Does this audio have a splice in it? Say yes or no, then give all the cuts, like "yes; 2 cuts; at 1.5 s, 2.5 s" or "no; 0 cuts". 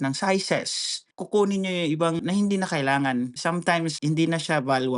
yes; 3 cuts; at 1.1 s, 2.2 s, 3.7 s